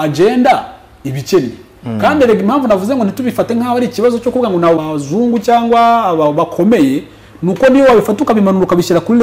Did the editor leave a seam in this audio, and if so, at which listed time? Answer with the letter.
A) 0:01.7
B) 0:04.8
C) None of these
B